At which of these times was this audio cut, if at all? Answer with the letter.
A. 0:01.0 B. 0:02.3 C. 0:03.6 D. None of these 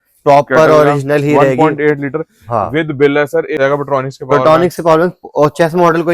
C